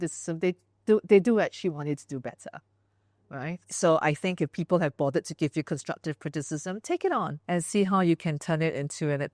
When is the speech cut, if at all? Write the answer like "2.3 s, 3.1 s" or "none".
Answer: 3.7 s, 7.4 s